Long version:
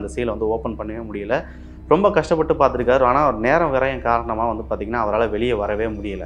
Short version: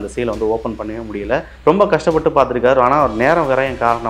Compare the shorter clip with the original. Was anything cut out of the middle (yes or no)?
yes